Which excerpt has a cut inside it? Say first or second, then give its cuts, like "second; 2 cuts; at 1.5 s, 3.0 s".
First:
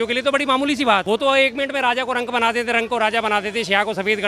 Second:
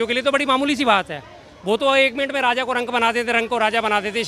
first; 1 cut; at 1.0 s